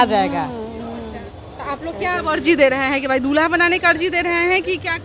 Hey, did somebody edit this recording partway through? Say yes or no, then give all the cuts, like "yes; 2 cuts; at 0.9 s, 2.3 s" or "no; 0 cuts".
no; 0 cuts